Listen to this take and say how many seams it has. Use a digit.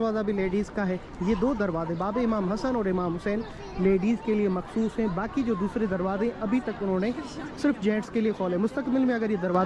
0